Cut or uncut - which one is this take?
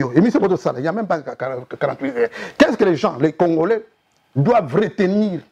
uncut